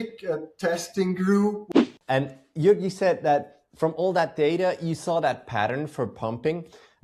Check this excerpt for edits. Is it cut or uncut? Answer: cut